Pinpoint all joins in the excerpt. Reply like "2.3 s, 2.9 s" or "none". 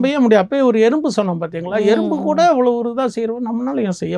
none